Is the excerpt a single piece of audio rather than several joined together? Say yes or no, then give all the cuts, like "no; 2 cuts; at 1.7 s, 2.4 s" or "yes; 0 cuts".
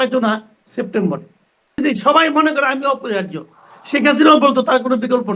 no; 1 cut; at 1.8 s